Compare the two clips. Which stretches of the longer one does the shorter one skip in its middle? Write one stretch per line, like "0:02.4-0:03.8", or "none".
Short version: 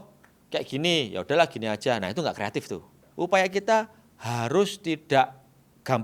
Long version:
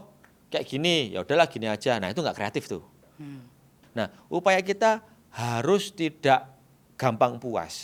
0:03.0-0:04.2